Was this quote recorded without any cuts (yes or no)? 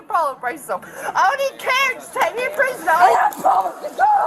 no